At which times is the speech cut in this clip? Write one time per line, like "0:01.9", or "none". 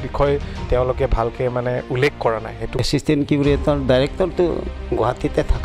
0:02.8